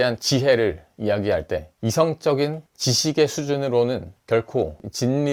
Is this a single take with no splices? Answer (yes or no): yes